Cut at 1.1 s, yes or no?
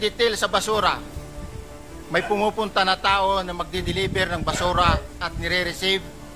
no